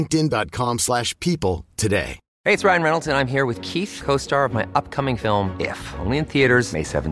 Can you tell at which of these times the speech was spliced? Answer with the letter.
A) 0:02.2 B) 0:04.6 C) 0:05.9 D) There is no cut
A